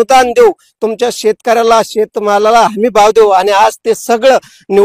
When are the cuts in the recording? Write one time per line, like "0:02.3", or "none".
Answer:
none